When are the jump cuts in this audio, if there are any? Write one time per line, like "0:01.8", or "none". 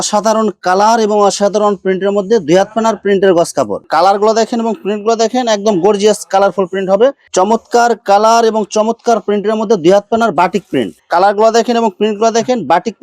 0:03.8
0:07.2
0:10.9